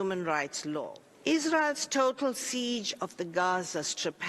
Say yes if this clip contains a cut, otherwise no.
yes